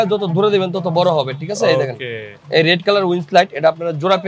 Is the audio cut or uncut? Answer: uncut